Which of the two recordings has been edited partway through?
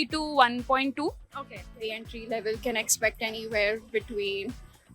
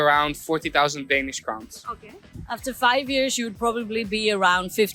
first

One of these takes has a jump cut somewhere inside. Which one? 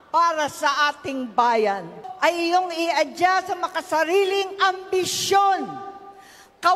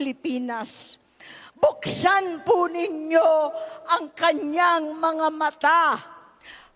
first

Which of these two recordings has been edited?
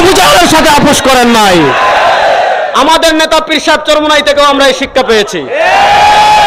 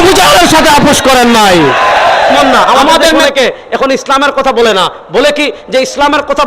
second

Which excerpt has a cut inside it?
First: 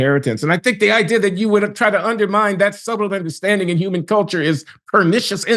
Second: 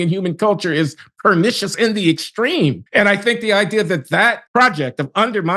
second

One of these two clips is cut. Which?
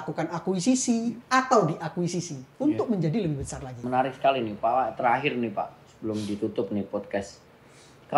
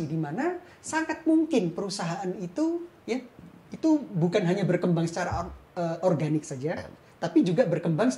first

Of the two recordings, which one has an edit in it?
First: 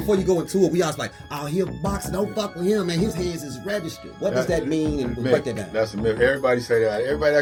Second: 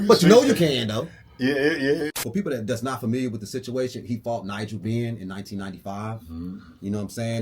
second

